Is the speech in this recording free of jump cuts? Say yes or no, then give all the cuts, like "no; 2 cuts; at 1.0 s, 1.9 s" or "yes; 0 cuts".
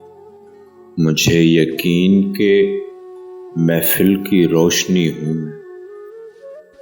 no; 1 cut; at 0.9 s